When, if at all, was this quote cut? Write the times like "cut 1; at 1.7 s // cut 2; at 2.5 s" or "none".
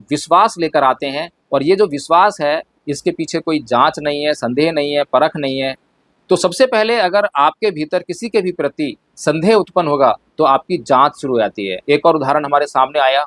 cut 1; at 11.7 s